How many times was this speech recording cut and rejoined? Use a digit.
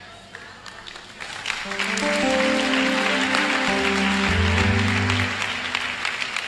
0